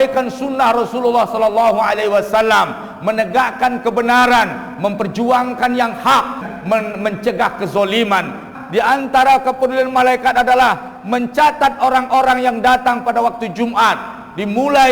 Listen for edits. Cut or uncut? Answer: cut